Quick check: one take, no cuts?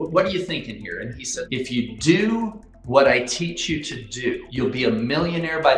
no; 2 cuts; at 1.4 s, 4.5 s

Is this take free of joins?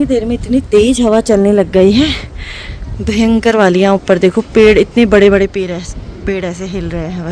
yes; 0 cuts

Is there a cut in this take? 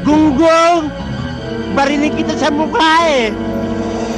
no; 0 cuts

